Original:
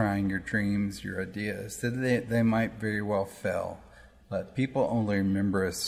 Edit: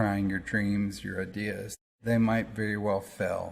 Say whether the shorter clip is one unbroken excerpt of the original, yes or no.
no